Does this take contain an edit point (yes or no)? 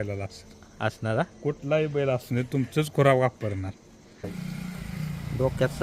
yes